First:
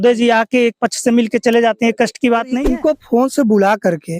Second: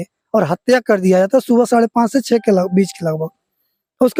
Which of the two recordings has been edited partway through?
first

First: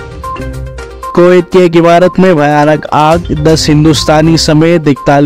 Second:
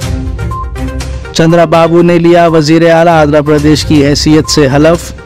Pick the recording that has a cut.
second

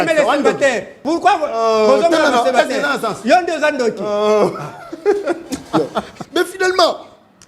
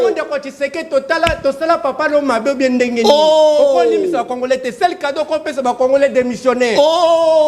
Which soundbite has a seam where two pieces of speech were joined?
first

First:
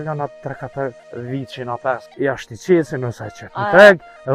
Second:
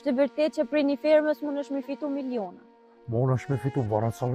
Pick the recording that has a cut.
first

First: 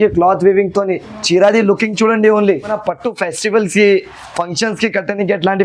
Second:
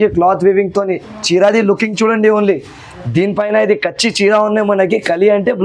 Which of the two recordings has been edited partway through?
first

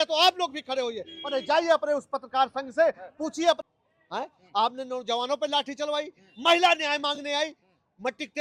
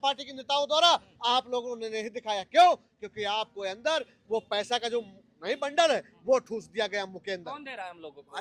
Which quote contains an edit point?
first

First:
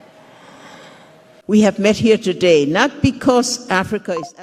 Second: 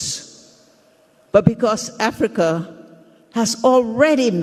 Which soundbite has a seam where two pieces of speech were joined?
first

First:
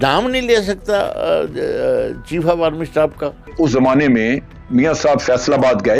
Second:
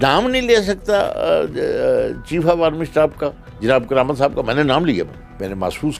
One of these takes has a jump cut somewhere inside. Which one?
first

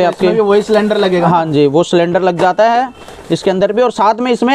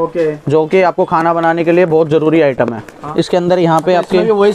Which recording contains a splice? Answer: second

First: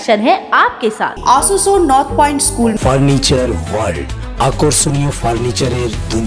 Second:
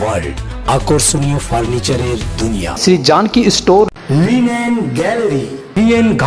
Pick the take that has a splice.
first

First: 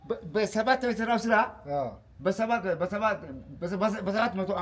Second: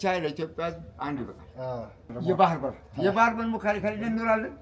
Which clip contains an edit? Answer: second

